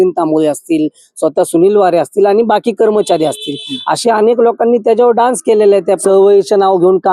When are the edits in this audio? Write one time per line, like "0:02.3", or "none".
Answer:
0:06.0

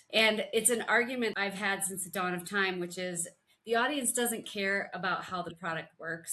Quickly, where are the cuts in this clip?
0:01.3

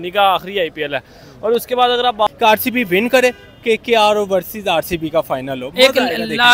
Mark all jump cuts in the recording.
0:02.3

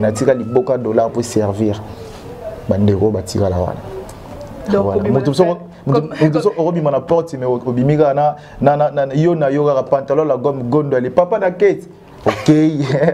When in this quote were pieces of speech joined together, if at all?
none

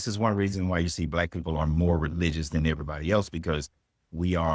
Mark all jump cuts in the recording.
none

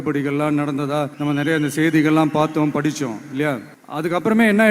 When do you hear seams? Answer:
0:01.1
0:03.8

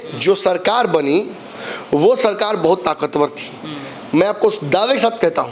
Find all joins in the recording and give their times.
none

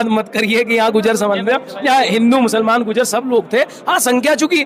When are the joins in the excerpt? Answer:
none

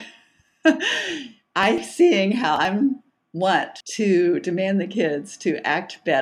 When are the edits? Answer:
0:03.8

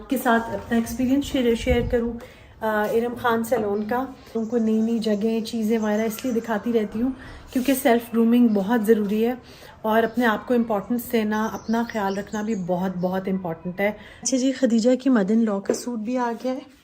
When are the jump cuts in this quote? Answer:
0:04.3
0:14.3

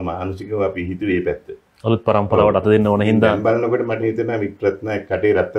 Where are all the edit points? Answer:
none

